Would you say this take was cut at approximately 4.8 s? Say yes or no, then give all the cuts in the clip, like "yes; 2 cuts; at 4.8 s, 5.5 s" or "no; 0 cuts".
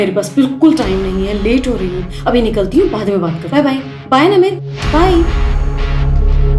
no; 0 cuts